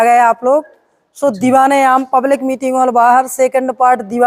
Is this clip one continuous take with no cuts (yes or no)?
yes